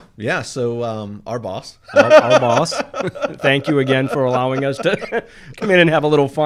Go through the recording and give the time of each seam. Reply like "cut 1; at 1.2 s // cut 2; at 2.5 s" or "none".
none